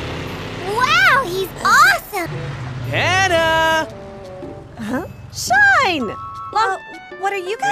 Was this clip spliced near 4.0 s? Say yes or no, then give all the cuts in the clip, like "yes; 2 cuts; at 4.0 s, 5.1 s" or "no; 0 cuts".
no; 2 cuts; at 2.3 s, 6.7 s